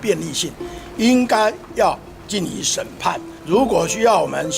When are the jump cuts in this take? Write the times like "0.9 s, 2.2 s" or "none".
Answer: 3.3 s